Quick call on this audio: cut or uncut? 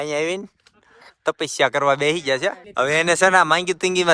cut